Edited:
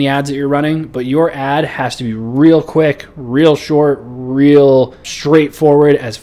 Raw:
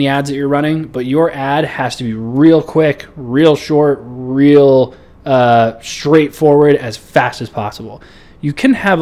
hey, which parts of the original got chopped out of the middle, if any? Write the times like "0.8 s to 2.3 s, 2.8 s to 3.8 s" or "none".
5.1 s to 5.9 s